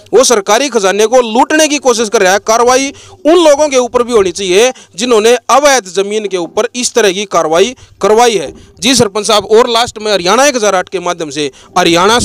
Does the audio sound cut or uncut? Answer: uncut